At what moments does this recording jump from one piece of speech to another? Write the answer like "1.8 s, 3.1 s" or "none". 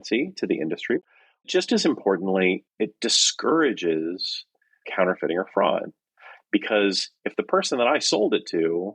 1.0 s, 4.8 s